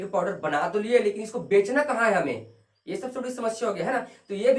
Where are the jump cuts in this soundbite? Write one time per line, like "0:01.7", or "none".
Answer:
none